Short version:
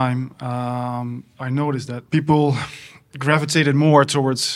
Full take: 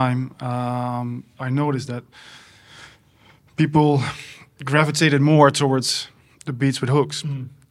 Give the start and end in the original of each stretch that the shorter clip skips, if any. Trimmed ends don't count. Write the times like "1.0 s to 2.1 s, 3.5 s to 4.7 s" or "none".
2.0 s to 3.5 s